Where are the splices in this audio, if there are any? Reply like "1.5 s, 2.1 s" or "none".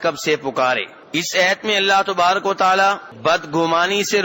0.9 s, 3.1 s